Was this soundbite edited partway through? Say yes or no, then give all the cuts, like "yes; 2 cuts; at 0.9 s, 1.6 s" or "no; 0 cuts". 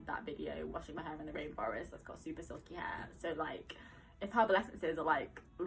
no; 0 cuts